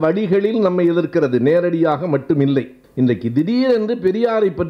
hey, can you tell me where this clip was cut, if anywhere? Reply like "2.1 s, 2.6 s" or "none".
2.8 s

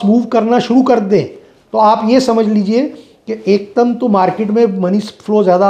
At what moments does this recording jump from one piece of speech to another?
none

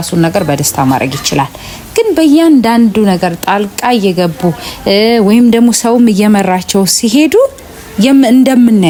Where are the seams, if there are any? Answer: none

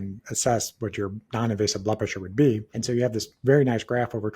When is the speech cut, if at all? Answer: 1.2 s, 2.7 s

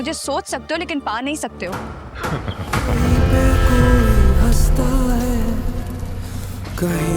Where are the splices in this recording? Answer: 2.9 s

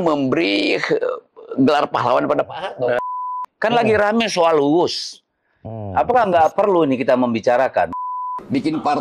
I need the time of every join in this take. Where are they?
3.3 s, 8.1 s

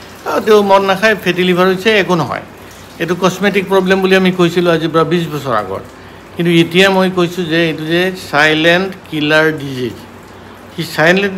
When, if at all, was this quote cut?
none

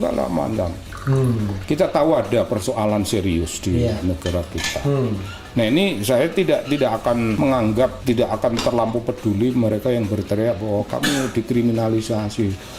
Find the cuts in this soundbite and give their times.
7.8 s

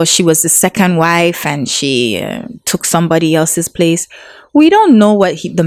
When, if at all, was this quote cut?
none

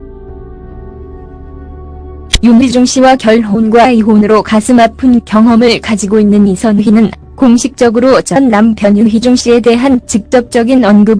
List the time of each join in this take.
1.5 s

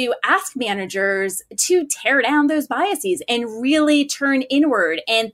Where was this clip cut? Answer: none

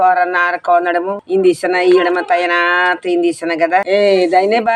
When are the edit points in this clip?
1.2 s, 3.8 s

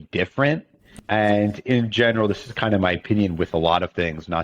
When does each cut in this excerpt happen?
0.9 s

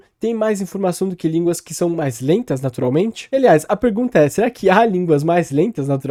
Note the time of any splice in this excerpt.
none

